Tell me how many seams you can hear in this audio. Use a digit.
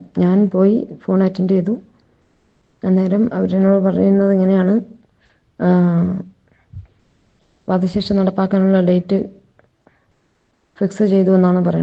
0